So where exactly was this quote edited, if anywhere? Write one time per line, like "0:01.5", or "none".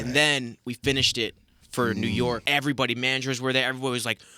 0:02.4

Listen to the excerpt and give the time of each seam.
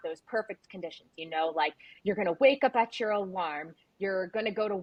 none

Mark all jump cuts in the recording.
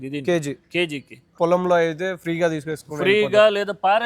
0:01.2

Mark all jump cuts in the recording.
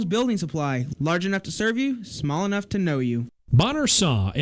0:03.3

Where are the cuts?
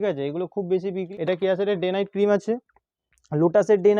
0:01.0

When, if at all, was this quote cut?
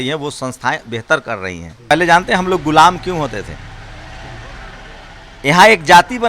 0:01.9

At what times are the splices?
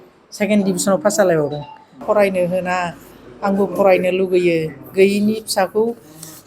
0:02.0

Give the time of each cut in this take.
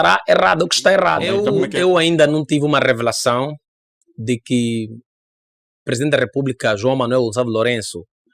0:01.4

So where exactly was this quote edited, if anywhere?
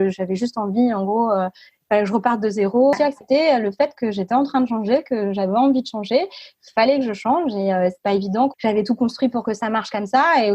0:03.0
0:08.5

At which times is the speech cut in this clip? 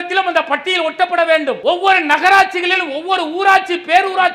0:01.6

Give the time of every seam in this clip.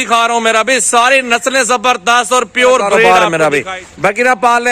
0:03.1

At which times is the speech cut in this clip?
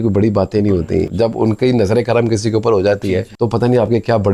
0:01.1
0:03.3

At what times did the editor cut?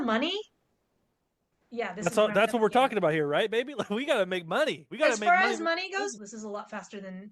0:06.1

